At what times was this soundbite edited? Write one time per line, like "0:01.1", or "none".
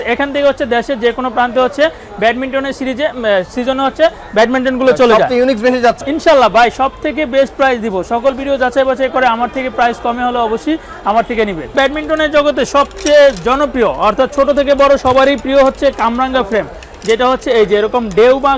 0:06.0
0:11.7